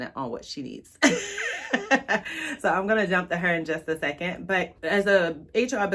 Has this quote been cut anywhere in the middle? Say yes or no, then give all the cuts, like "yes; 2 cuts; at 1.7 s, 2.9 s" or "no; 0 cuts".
no; 0 cuts